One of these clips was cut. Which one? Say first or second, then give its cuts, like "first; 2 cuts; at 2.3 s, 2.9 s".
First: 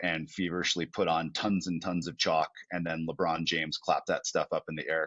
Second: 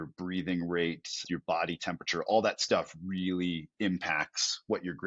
second; 1 cut; at 1.2 s